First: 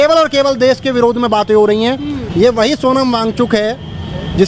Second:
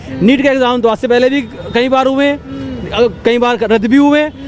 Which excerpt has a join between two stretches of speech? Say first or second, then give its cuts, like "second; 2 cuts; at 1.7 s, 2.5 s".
first; 1 cut; at 2.2 s